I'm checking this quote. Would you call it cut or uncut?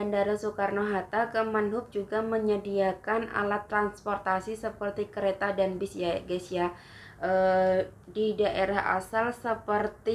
uncut